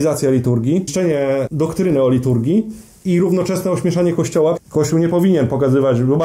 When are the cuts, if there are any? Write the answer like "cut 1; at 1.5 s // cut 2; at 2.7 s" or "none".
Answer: cut 1; at 1.2 s // cut 2; at 4.6 s